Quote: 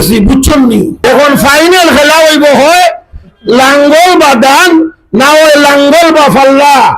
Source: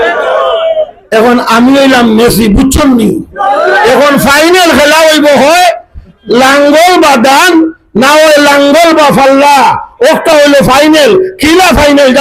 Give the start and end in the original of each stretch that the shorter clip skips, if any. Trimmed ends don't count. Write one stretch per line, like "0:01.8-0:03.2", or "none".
0:03.3-0:03.8